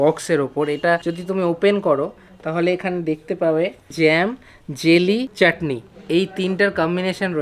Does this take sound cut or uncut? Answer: cut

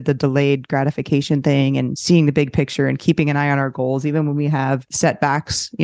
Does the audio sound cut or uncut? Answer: cut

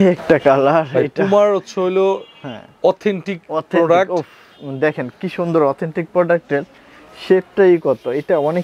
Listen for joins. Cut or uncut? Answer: uncut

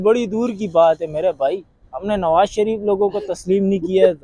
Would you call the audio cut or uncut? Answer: uncut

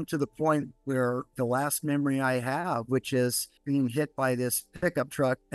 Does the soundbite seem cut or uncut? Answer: uncut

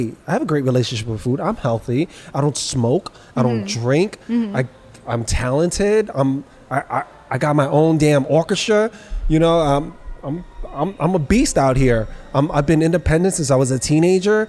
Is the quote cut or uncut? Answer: uncut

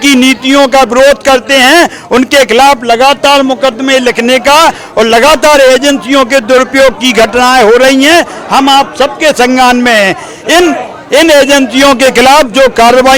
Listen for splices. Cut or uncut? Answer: uncut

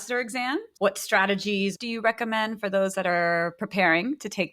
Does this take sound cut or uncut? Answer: cut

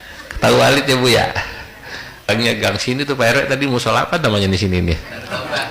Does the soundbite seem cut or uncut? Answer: cut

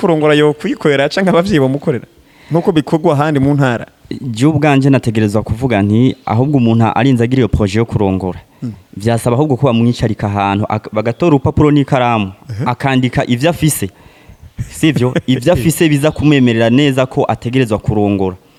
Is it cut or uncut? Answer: uncut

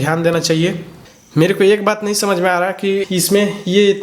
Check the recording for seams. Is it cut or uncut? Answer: cut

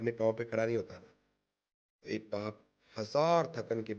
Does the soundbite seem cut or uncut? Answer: uncut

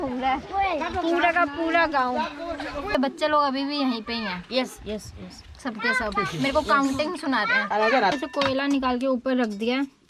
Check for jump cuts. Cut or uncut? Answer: cut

